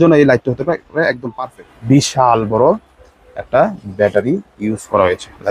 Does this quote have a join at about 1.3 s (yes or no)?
yes